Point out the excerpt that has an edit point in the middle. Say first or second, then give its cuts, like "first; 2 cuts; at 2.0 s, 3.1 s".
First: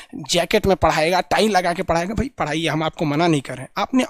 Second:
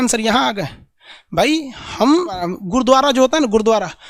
second; 1 cut; at 2.5 s